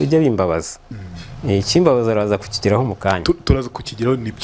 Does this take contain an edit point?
no; 0 cuts

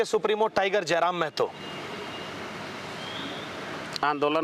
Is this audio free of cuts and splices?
yes; 0 cuts

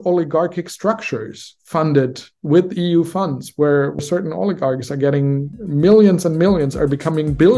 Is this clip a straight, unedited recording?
no; 1 cut; at 4.0 s

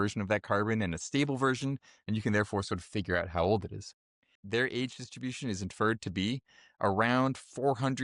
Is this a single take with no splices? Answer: no; 1 cut; at 4.4 s

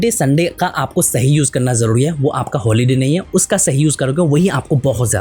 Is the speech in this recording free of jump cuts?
yes; 0 cuts

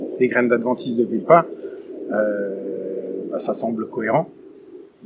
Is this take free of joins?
yes; 0 cuts

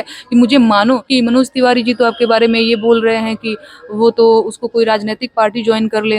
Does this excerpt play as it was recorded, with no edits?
no; 1 cut; at 1.0 s

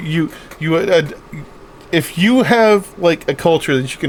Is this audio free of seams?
yes; 0 cuts

